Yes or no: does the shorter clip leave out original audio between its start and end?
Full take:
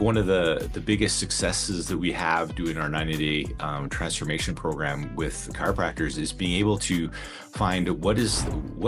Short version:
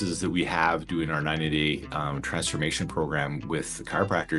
no